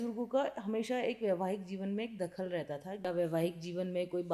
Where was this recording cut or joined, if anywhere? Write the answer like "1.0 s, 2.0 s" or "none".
3.1 s